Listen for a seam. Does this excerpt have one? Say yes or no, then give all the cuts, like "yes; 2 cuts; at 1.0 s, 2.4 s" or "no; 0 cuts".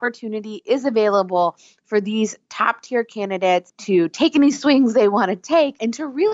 yes; 1 cut; at 3.7 s